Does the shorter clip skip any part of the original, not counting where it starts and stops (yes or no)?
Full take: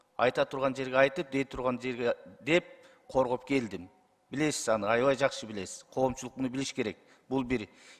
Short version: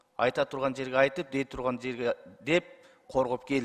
no